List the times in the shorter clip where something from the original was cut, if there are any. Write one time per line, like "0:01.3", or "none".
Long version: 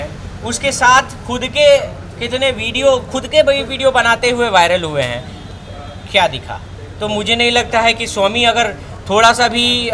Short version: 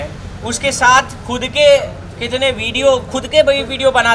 none